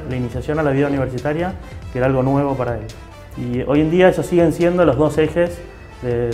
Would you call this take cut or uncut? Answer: uncut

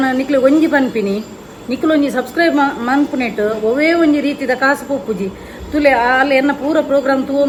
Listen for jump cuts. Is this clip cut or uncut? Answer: uncut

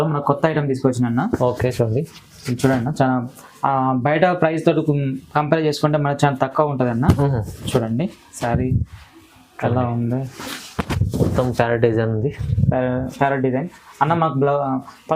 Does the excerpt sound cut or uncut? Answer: uncut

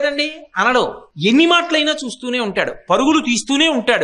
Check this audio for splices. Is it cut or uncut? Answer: cut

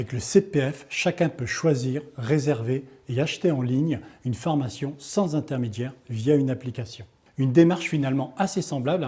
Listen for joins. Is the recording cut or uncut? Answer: uncut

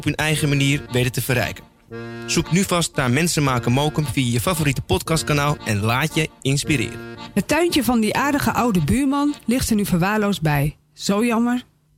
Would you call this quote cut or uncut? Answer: cut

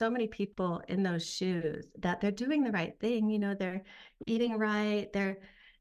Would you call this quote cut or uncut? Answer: uncut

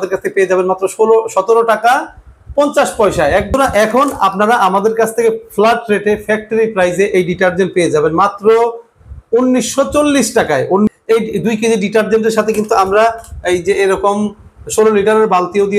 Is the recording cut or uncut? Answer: cut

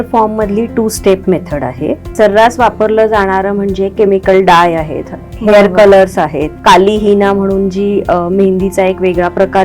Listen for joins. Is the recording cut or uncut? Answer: cut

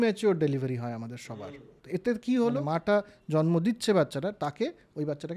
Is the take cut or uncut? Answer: cut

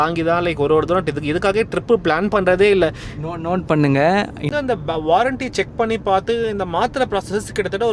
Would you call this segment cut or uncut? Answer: cut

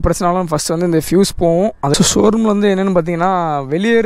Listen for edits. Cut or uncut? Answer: cut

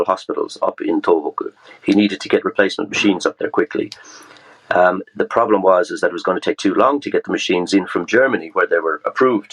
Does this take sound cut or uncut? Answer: uncut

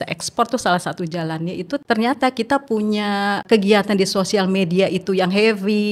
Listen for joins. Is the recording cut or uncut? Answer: cut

